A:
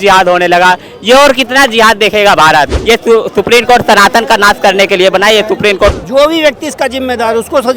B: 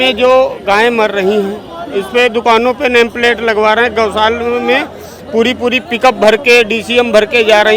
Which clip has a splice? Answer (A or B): A